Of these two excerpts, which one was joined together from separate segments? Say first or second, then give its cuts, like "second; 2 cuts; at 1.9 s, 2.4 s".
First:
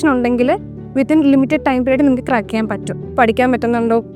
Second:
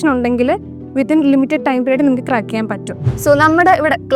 first; 1 cut; at 3.0 s